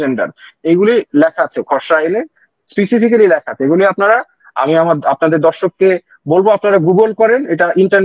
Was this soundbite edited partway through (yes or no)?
no